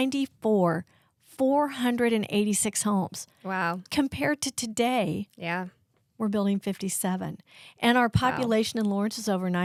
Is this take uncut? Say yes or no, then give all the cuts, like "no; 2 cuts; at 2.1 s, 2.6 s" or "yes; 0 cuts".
yes; 0 cuts